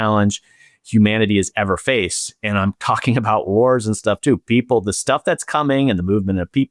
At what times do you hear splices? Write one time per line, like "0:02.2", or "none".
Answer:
none